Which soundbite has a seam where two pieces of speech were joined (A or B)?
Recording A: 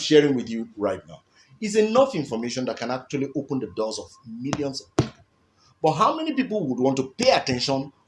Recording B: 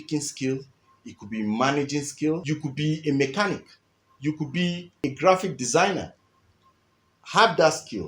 B